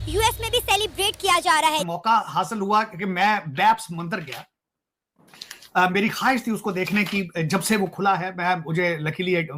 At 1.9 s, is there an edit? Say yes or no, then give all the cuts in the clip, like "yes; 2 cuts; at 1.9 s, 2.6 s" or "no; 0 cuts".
yes; 1 cut; at 1.9 s